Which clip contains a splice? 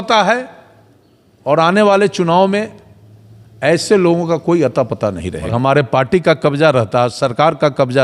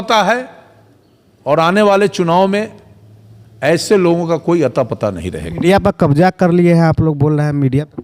first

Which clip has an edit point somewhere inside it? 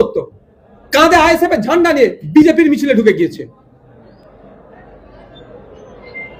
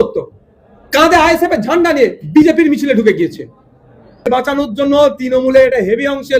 second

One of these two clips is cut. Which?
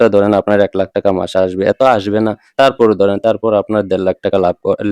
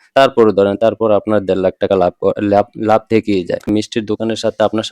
second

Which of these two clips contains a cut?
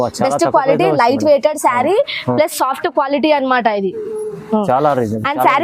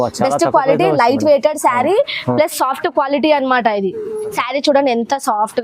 second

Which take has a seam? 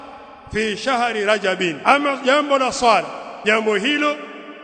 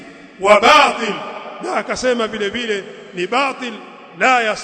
first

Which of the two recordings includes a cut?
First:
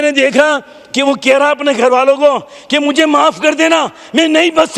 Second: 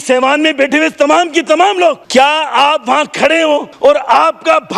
second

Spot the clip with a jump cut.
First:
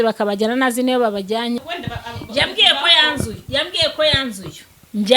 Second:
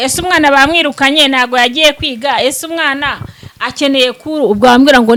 first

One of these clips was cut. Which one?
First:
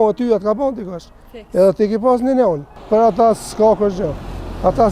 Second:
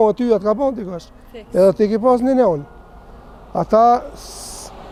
first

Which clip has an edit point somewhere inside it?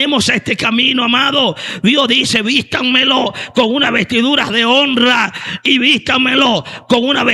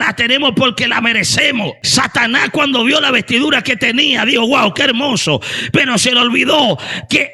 second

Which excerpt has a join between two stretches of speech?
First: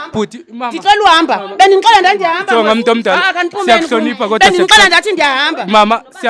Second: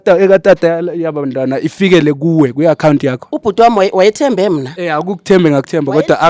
second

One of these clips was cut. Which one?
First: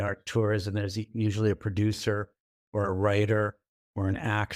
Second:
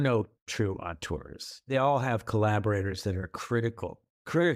second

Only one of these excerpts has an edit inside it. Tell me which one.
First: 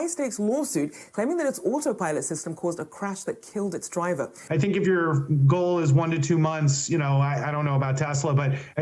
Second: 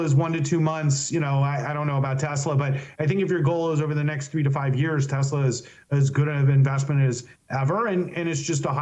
first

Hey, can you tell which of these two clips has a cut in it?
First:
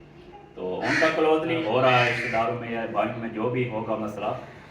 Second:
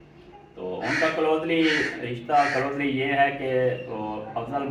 first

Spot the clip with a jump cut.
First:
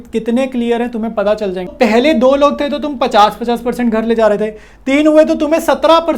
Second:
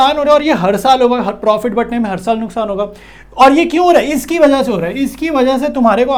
first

